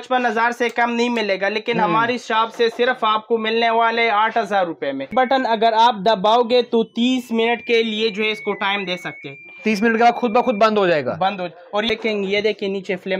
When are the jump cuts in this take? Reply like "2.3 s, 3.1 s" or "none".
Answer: 5.1 s, 11.9 s